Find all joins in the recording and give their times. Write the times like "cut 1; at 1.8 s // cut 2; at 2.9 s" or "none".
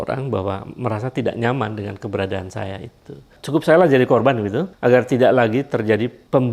cut 1; at 3.3 s // cut 2; at 4.7 s